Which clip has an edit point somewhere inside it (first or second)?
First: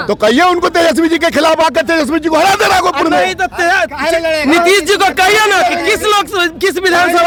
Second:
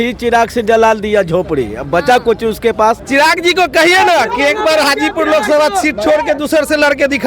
second